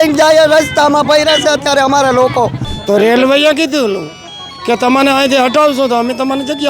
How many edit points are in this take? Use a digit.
1